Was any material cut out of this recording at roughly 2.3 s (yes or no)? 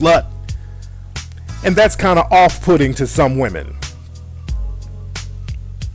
yes